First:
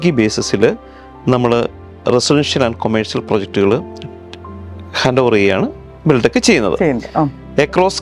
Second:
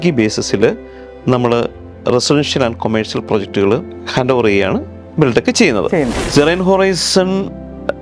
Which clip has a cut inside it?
second; 2 cuts; at 4.0 s, 6.2 s

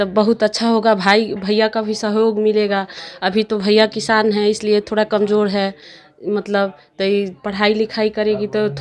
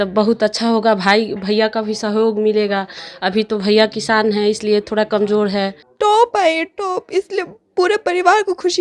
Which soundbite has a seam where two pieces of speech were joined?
second; 1 cut; at 5.8 s

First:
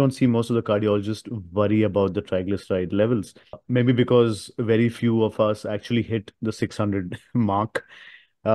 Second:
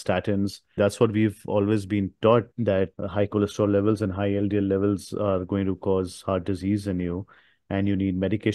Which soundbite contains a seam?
second; 2 cuts; at 0.8 s, 2.5 s

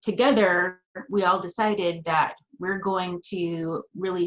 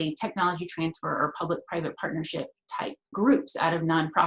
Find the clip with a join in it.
second; 1 cut; at 3.1 s

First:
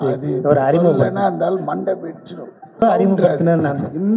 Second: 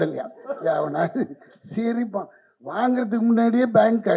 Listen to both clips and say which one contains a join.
first; 1 cut; at 2.8 s

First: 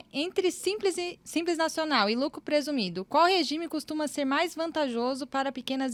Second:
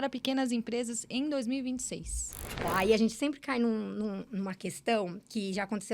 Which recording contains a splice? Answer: second; 1 cut; at 2.5 s

